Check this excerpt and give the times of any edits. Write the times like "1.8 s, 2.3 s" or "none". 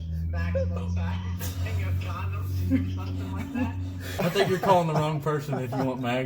4.2 s